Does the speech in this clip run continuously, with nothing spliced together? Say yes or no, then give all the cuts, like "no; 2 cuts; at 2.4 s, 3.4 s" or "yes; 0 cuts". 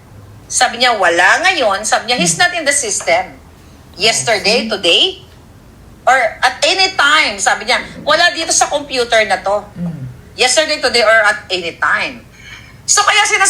no; 1 cut; at 12.2 s